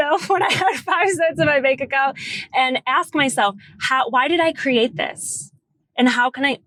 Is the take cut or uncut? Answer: uncut